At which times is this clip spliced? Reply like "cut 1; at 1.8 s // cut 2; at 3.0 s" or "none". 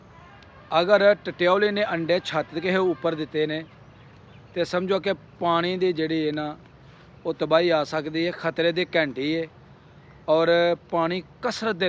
none